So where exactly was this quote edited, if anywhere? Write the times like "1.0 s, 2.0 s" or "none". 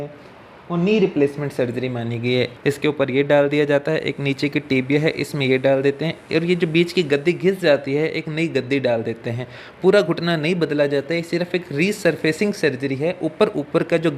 2.5 s